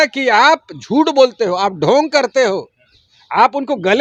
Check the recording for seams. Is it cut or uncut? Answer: uncut